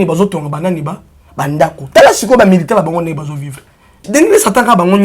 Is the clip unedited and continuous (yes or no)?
no